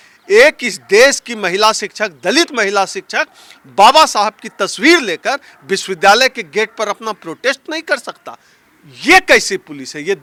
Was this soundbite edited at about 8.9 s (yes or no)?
no